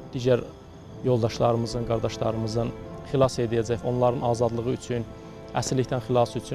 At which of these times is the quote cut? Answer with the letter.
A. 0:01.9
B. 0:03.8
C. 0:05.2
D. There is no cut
B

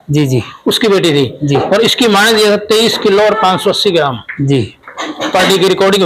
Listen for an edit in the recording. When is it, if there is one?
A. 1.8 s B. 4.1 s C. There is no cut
C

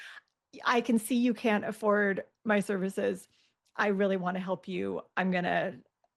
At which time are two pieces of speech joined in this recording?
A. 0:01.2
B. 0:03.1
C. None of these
C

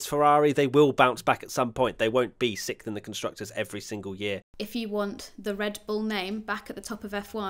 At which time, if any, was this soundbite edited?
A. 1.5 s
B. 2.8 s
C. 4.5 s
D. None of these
C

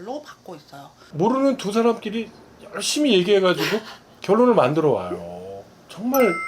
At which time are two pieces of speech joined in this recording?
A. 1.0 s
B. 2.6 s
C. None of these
A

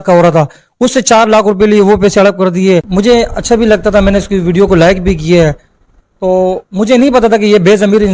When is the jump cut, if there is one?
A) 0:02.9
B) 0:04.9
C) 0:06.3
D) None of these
A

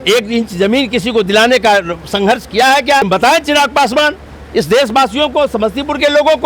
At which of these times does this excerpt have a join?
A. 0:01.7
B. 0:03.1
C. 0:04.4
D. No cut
B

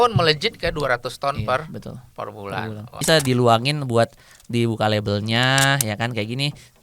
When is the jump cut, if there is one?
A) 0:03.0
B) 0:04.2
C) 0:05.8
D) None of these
A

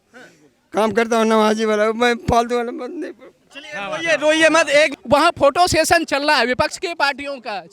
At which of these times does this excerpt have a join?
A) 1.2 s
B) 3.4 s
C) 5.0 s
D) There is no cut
C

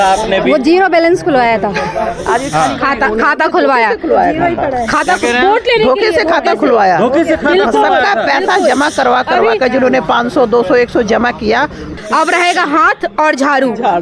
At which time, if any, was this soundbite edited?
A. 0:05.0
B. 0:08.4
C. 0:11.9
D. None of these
C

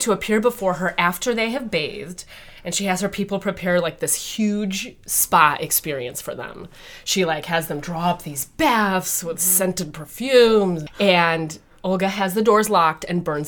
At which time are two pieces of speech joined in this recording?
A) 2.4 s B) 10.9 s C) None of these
B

